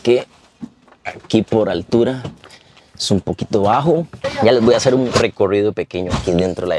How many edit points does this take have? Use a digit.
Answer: 2